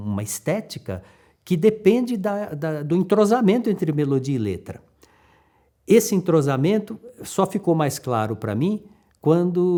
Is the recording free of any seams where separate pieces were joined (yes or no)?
yes